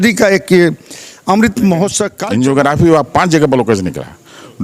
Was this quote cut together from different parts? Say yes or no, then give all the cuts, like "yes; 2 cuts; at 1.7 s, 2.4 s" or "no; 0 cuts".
yes; 1 cut; at 2.1 s